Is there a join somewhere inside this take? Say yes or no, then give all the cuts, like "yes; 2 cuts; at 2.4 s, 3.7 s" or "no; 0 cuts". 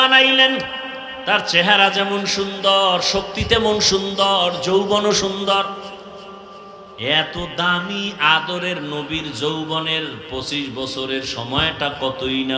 no; 0 cuts